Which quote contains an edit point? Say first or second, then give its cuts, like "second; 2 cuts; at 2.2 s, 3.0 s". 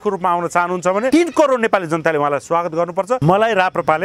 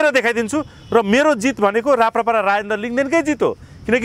first; 2 cuts; at 1.1 s, 3.2 s